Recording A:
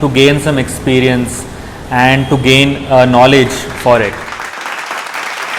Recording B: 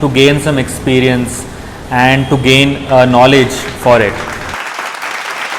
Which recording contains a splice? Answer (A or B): B